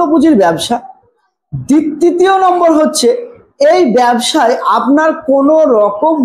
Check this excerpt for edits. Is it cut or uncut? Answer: uncut